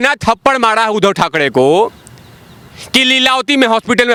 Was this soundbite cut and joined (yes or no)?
no